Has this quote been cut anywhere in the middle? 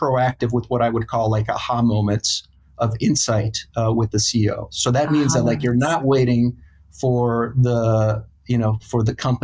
no; 0 cuts

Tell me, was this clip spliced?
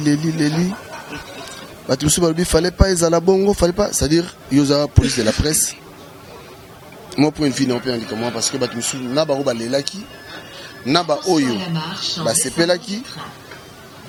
no; 0 cuts

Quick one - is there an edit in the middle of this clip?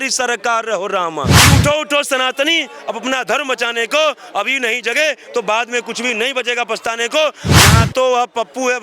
yes; 2 cuts; at 1.4 s, 7.4 s

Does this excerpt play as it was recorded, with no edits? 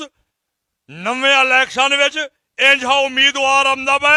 yes; 0 cuts

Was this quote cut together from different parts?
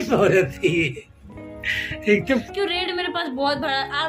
yes; 1 cut; at 2.5 s

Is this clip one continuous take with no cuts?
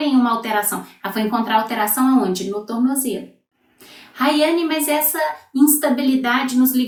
yes; 0 cuts

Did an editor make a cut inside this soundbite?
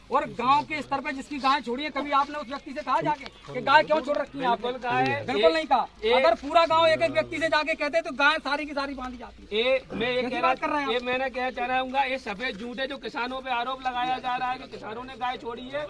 no; 0 cuts

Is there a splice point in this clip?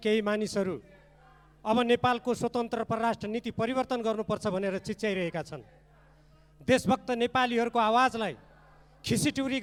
no; 0 cuts

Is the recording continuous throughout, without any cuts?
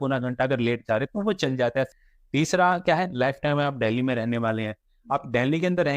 no; 1 cut; at 1.9 s

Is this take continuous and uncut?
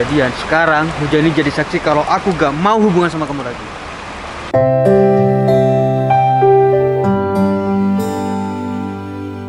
yes; 0 cuts

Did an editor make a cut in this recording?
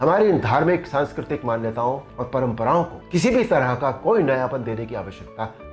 no; 0 cuts

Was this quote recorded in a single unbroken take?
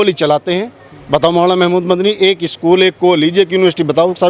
yes; 0 cuts

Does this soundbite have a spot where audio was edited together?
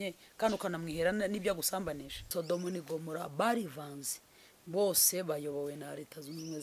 yes; 1 cut; at 2.3 s

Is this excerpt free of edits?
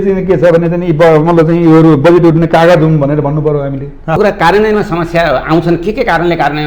no; 1 cut; at 4.2 s

